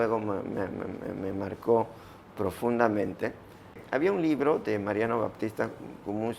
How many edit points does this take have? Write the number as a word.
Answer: one